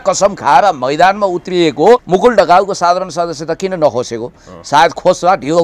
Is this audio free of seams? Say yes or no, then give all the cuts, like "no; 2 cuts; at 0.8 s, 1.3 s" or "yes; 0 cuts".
no; 1 cut; at 2.0 s